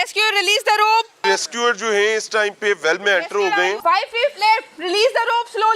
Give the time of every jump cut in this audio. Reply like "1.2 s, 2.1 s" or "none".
1.2 s, 3.8 s